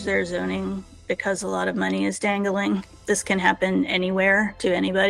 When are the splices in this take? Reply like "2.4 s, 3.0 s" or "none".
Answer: 3.0 s